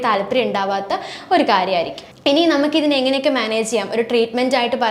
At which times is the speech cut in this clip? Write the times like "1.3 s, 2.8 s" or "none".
2.0 s